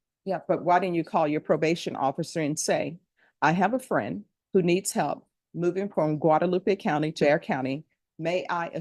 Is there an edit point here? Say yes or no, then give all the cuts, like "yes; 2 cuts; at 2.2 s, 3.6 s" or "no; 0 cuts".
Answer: yes; 1 cut; at 7.2 s